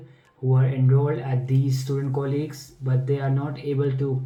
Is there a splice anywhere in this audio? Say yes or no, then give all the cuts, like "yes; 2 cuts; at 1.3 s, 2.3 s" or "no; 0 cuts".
no; 0 cuts